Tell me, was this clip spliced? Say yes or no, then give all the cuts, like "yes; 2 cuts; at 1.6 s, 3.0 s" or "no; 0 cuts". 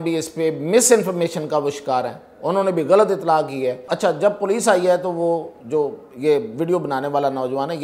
yes; 1 cut; at 3.8 s